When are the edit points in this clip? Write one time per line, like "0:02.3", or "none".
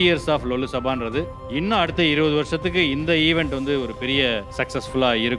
0:01.4
0:04.5